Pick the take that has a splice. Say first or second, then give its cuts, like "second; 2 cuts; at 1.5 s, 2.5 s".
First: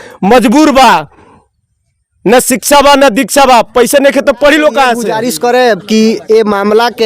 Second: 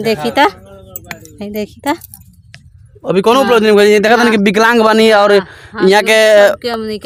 first; 1 cut; at 5.0 s